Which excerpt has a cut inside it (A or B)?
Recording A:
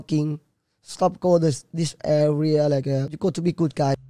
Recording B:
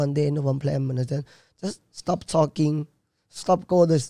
A